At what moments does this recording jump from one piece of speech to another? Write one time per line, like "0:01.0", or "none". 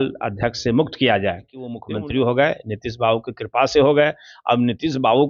0:01.8